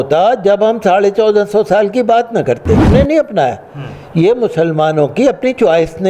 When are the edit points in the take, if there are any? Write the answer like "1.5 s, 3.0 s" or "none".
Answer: 2.9 s